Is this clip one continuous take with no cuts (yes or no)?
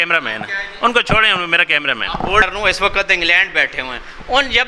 no